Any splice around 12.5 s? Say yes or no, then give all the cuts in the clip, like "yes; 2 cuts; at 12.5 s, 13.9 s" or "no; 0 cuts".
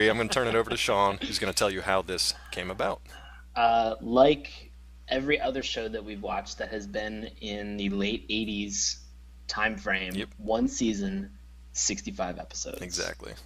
yes; 1 cut; at 12.5 s